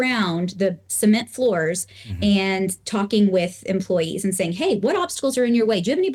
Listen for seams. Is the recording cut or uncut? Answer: uncut